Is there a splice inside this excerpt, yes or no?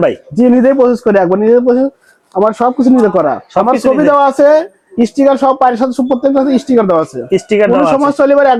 no